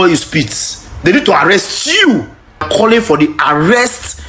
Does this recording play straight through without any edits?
no; 1 cut; at 2.6 s

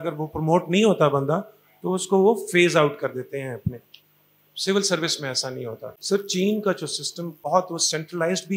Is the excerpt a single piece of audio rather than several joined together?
no; 2 cuts; at 5.9 s, 7.5 s

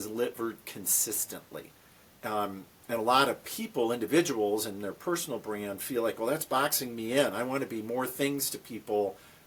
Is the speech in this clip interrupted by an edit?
no; 0 cuts

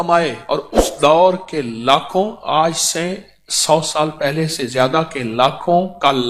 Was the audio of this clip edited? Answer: no; 0 cuts

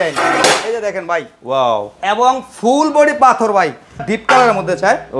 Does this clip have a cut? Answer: yes; 1 cut; at 4.1 s

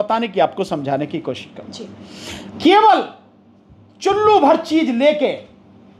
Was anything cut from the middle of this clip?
yes; 1 cut; at 2.5 s

